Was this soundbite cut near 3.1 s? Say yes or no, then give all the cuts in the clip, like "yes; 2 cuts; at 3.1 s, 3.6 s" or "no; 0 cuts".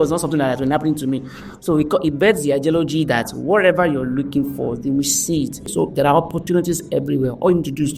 no; 1 cut; at 5.7 s